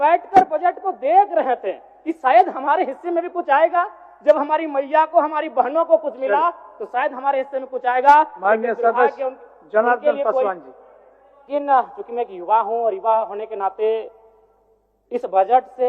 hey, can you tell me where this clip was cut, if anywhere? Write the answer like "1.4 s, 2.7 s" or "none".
11.5 s